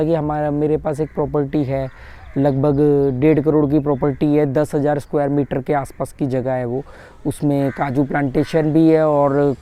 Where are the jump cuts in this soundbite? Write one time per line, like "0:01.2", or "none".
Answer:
none